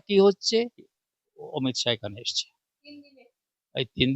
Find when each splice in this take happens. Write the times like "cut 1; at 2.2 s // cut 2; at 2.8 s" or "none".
cut 1; at 1.0 s